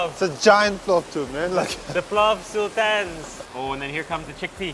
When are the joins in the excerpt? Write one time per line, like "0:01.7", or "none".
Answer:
none